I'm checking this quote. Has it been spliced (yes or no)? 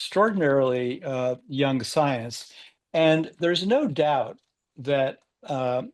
no